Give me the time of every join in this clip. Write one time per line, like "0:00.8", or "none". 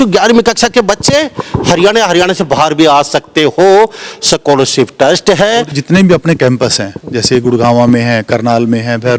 0:05.8